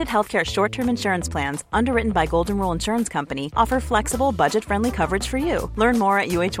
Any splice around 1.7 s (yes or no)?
no